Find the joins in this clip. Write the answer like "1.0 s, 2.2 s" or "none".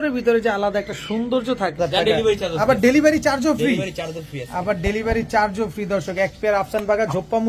1.8 s